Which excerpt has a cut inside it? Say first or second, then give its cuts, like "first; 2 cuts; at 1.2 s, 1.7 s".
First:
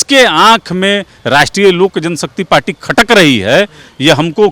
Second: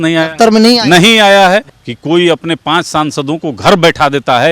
second; 1 cut; at 1.7 s